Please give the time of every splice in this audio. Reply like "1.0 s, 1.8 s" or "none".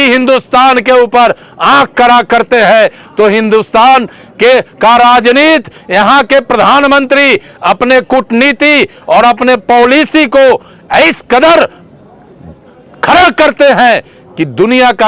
none